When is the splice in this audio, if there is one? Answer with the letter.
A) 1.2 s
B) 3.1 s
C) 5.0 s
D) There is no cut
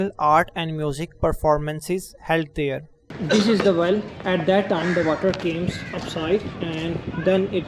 B